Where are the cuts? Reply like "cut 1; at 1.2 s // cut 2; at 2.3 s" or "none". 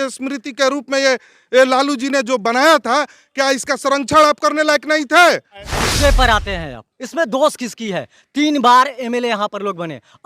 cut 1; at 5.8 s

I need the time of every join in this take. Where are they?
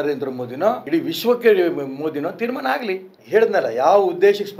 cut 1; at 0.8 s // cut 2; at 3.2 s

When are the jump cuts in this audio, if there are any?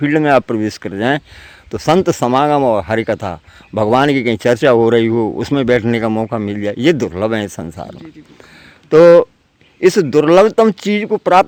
none

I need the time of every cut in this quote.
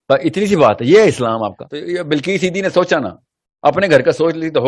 cut 1; at 1.7 s

